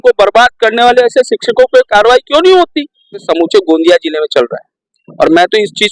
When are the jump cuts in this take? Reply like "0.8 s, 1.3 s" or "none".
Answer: 3.3 s